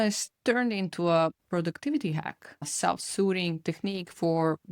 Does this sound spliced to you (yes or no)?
yes